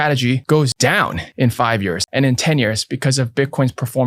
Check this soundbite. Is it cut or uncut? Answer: cut